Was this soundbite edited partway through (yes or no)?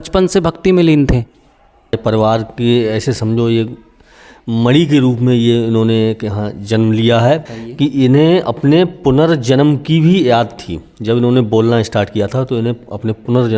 yes